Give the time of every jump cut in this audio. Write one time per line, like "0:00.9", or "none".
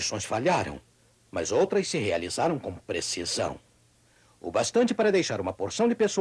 none